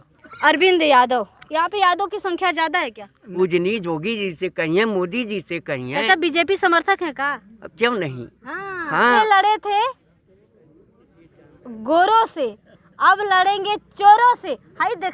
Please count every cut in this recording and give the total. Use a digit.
2